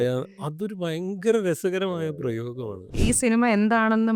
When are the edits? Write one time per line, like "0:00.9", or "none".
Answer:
0:03.0